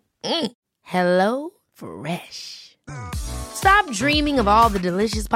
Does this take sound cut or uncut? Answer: uncut